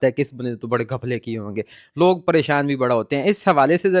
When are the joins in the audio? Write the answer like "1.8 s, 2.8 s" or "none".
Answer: none